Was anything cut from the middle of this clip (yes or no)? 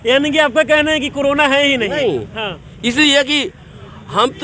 no